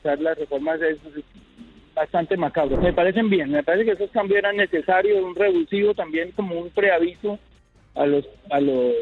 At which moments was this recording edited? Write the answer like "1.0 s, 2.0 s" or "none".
2.8 s

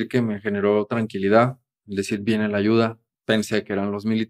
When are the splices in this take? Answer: 3.0 s

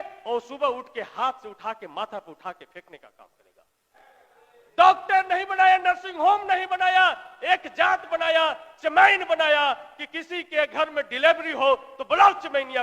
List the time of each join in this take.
4.0 s

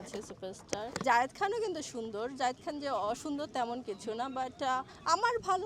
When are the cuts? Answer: 1.0 s

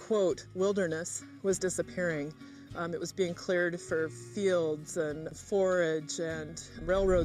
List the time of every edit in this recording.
none

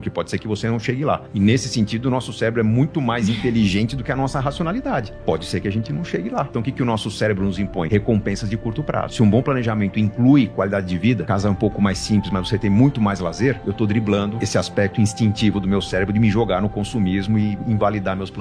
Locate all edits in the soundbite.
1.3 s, 6.5 s, 7.9 s, 9.1 s, 11.2 s, 13.6 s, 14.4 s

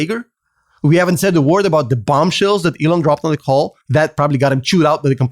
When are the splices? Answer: 3.8 s

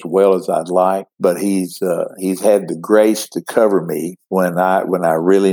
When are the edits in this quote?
1.1 s, 4.1 s

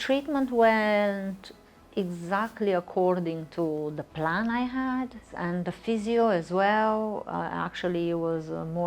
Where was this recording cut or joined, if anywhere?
5.3 s

